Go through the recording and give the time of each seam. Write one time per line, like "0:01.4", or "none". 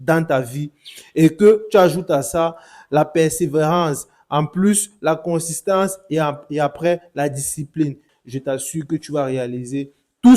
0:08.1

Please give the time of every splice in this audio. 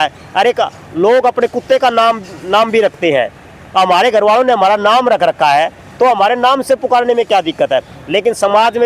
none

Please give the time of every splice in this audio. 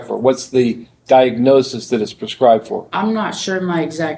none

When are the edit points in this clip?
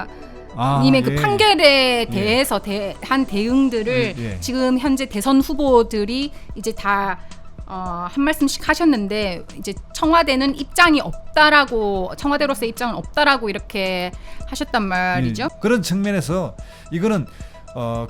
0:15.5

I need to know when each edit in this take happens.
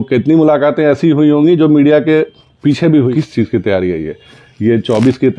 0:03.1

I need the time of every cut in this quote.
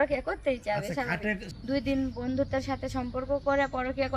0:01.5

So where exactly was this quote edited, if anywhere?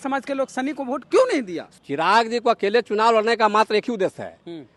0:01.6

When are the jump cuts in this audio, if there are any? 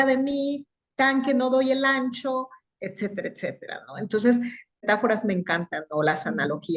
0:04.8

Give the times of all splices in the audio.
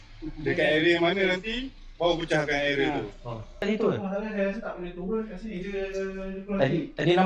0:03.6

